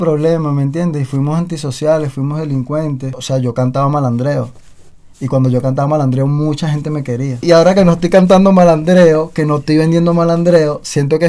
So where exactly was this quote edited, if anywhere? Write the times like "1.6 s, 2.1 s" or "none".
3.2 s, 7.4 s

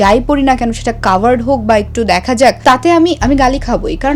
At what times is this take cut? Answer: 2.6 s

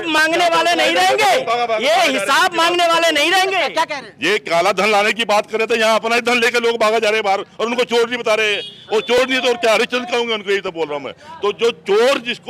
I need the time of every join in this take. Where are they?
none

